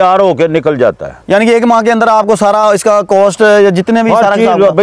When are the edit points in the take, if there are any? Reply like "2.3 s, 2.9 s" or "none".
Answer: none